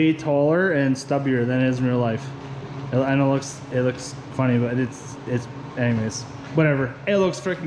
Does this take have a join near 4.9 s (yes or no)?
no